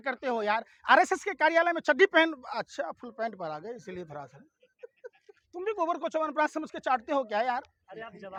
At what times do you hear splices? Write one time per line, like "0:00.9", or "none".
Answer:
none